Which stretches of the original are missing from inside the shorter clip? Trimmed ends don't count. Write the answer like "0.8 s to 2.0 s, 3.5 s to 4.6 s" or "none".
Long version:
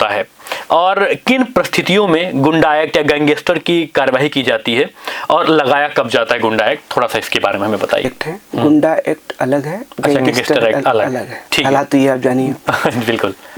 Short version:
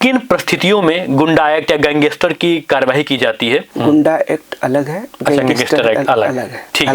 5.0 s to 8.5 s